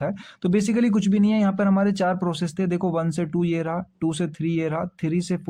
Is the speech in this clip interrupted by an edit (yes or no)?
no